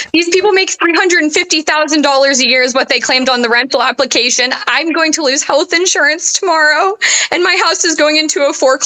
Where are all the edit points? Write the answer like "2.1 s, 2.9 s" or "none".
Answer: none